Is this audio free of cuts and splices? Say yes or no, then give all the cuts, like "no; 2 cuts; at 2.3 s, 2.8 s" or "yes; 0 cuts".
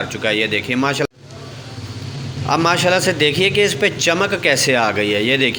yes; 0 cuts